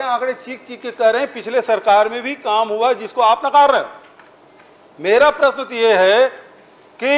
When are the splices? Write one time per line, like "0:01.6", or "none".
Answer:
none